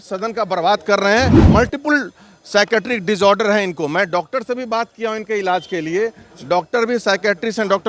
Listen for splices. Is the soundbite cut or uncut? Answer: cut